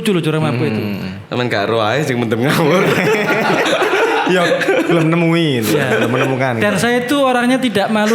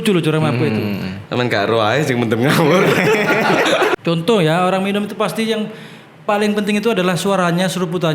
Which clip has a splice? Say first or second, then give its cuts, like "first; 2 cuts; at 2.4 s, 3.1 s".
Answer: second; 1 cut; at 3.9 s